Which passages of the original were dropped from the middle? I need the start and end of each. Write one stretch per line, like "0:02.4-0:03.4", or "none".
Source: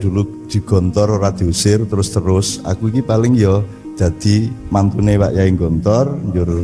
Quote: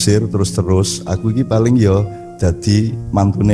none